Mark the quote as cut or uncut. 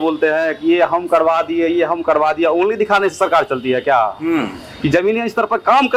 uncut